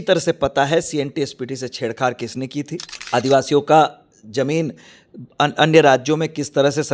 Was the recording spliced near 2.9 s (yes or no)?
yes